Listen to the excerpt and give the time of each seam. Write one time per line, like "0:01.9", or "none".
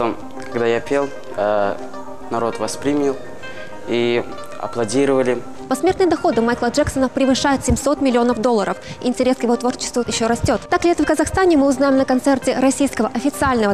0:05.6
0:10.4